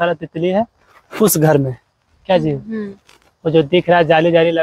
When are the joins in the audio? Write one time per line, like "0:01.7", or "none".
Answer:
none